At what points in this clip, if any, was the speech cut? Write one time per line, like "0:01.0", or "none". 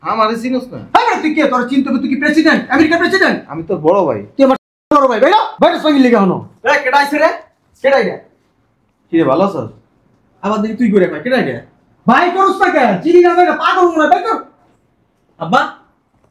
none